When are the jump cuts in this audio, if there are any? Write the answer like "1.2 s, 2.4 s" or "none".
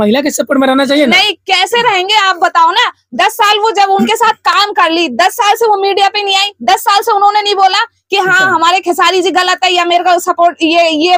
none